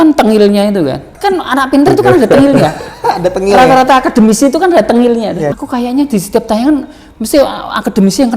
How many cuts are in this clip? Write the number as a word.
two